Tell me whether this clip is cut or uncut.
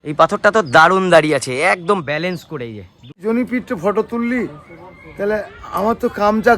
cut